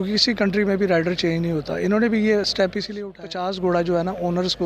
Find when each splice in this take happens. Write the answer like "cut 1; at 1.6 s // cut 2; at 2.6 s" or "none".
cut 1; at 2.9 s

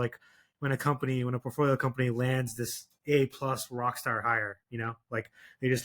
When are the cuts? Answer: none

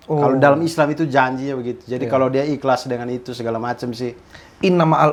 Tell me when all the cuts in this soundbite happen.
none

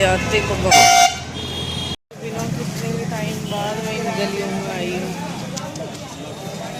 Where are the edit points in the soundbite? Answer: none

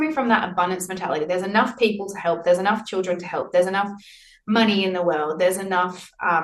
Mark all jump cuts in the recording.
none

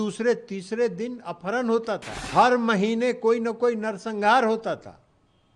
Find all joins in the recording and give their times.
cut 1; at 2.2 s

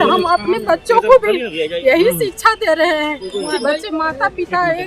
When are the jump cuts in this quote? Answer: none

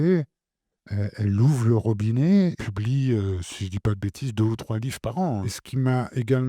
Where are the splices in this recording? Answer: cut 1; at 2.6 s // cut 2; at 5.6 s

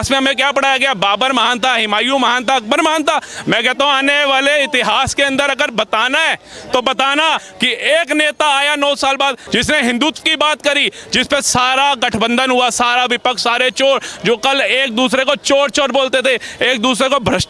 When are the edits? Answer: cut 1; at 7.4 s // cut 2; at 9.4 s

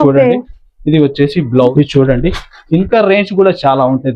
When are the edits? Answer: cut 1; at 1.7 s

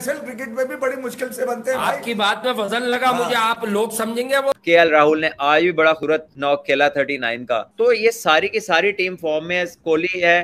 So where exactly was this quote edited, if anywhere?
cut 1; at 4.5 s // cut 2; at 6.1 s

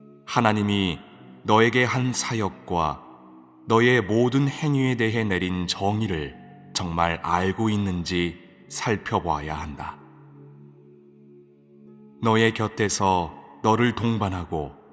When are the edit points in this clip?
none

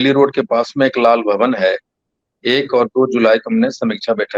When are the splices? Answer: none

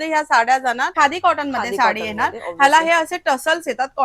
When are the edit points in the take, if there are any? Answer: cut 1; at 0.9 s

